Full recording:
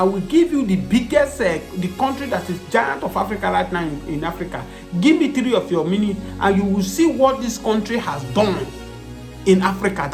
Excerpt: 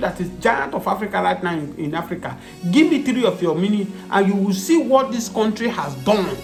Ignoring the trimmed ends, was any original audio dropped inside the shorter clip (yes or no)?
no